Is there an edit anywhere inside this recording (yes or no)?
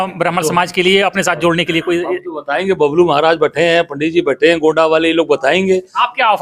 no